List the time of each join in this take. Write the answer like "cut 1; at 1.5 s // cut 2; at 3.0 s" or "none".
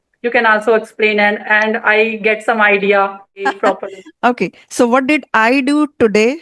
cut 1; at 3.5 s